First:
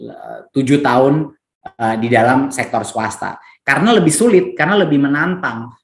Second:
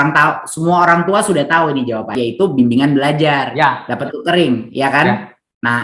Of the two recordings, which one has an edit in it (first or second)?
second